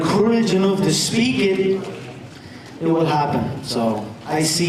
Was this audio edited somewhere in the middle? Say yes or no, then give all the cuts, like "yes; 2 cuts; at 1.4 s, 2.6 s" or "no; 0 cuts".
no; 0 cuts